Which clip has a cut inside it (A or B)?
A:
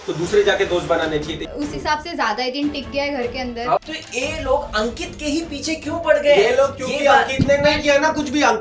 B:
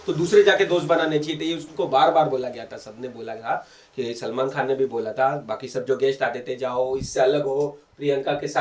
A